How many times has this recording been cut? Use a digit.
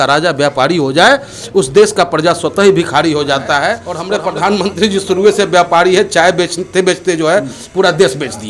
1